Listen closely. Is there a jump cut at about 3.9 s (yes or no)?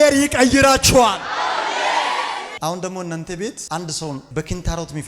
no